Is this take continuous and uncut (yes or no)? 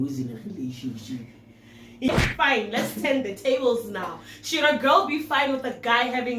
no